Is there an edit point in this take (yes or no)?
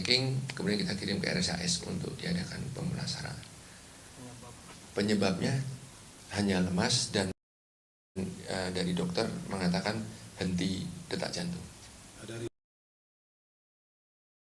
no